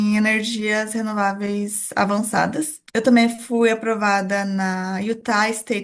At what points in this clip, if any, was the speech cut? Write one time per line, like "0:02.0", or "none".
0:02.8